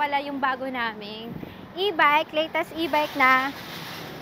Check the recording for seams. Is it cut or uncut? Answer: uncut